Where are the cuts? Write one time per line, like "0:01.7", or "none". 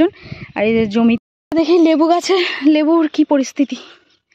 0:01.2